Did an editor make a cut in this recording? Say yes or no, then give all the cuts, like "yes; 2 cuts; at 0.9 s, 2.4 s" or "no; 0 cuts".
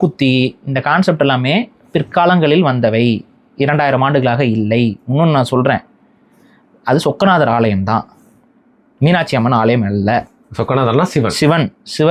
no; 0 cuts